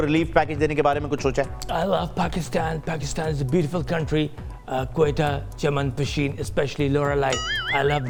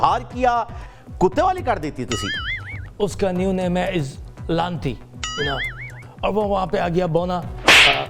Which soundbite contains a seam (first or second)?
second